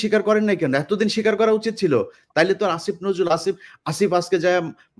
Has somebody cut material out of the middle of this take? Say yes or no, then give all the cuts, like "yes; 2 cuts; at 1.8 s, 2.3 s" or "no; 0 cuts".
no; 0 cuts